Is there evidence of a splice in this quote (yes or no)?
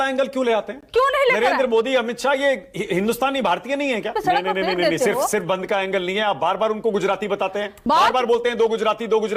no